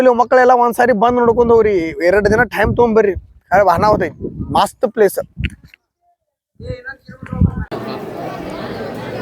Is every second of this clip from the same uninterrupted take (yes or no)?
no